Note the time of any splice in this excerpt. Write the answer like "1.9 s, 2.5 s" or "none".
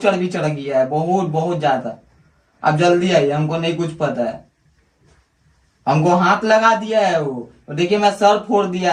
none